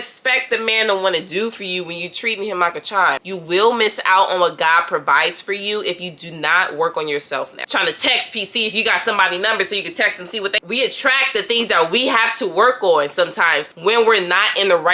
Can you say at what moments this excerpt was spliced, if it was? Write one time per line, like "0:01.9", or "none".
0:03.2
0:07.7
0:10.6